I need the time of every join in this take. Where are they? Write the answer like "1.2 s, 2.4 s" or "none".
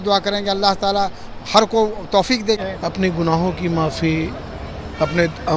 2.6 s